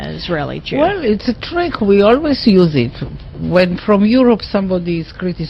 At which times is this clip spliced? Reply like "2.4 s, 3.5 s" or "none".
none